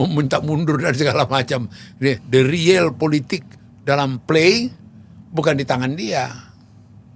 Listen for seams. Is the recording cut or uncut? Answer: uncut